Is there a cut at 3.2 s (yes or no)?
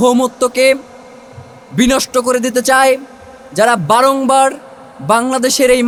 no